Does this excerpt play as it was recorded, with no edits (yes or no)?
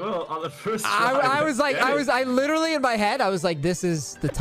yes